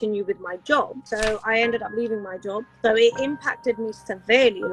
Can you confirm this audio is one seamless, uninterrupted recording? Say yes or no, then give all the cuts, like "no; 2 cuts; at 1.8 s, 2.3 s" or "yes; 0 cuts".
no; 2 cuts; at 1.0 s, 2.7 s